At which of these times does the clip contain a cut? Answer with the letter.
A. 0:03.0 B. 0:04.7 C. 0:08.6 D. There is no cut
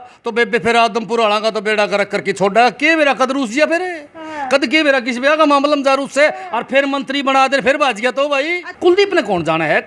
C